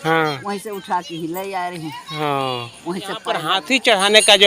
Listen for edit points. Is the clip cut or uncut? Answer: cut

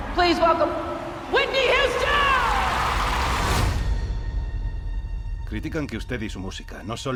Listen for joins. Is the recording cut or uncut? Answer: uncut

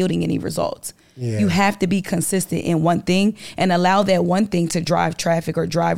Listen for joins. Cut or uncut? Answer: uncut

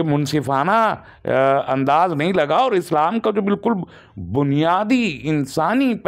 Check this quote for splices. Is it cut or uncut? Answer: uncut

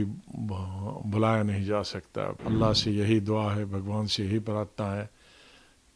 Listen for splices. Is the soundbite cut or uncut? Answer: cut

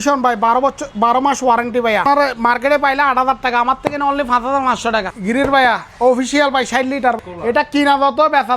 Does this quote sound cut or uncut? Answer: cut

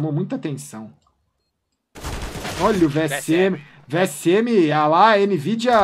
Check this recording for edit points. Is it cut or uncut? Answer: uncut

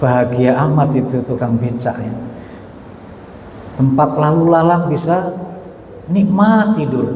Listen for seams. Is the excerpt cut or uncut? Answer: uncut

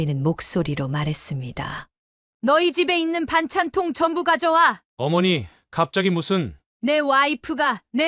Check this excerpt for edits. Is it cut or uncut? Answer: uncut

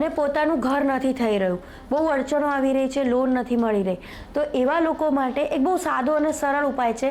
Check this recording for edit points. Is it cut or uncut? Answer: uncut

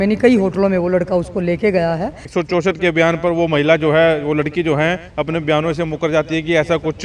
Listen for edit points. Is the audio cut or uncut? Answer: cut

